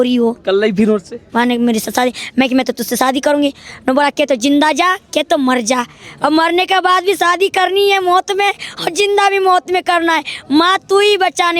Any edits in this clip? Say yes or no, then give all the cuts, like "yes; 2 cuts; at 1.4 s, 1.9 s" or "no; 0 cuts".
no; 0 cuts